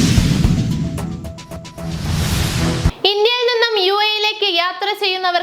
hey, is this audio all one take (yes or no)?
no